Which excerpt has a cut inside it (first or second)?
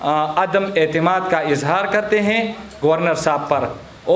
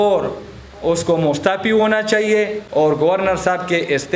second